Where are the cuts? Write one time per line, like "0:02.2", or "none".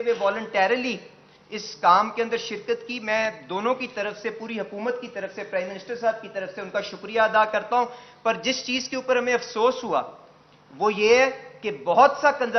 none